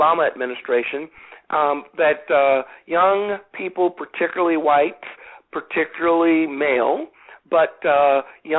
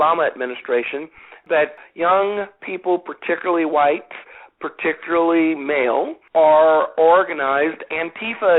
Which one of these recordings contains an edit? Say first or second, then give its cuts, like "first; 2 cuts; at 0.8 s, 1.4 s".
second; 2 cuts; at 1.7 s, 6.2 s